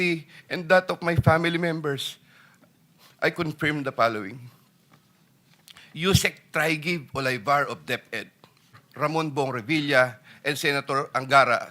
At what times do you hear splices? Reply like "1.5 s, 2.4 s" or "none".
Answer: 8.8 s